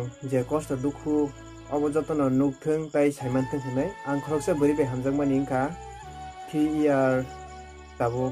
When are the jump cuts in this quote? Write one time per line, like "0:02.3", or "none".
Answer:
none